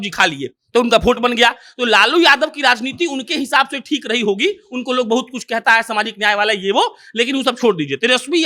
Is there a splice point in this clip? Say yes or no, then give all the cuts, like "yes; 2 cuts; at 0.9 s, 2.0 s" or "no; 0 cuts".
no; 0 cuts